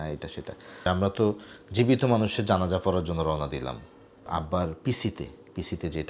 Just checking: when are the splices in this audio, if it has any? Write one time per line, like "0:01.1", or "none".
0:00.8
0:04.3